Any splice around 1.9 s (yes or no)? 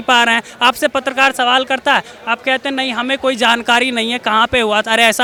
no